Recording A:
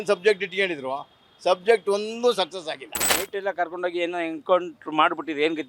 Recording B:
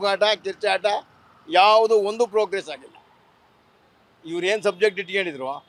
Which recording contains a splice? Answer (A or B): A